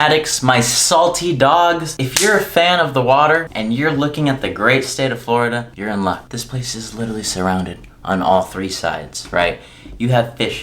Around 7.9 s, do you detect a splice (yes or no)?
no